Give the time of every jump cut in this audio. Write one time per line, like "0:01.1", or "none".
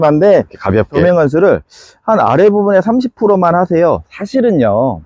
0:01.0